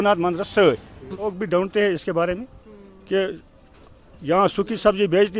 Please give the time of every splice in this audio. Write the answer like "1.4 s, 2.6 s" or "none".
1.2 s